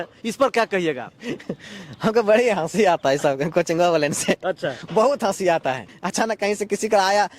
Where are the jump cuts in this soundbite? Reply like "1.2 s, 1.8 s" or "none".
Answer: 6.0 s